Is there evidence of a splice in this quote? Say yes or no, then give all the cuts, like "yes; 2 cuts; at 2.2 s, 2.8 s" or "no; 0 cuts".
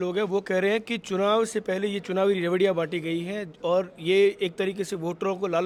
no; 0 cuts